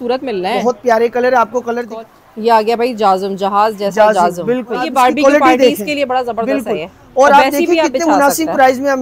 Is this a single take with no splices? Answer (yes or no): no